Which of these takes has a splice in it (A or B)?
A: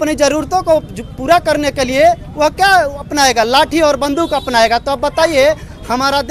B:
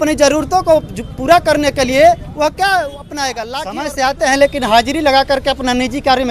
B